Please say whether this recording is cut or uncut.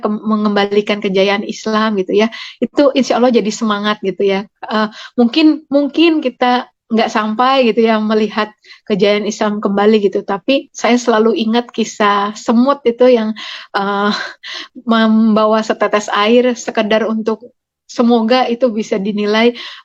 uncut